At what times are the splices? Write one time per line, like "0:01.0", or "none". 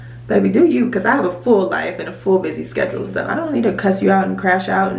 0:03.3